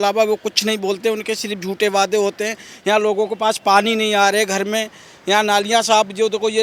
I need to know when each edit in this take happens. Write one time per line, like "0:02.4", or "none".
none